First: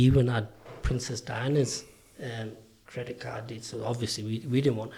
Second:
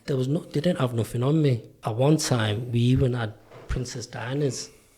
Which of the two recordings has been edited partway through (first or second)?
second